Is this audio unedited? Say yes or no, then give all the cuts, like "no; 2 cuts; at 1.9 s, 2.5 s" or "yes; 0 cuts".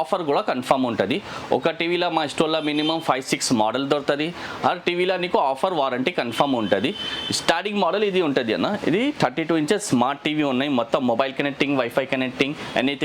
yes; 0 cuts